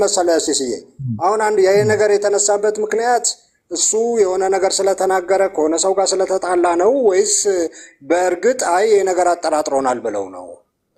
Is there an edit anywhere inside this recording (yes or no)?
no